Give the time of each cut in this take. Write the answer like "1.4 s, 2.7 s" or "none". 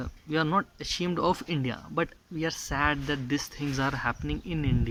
none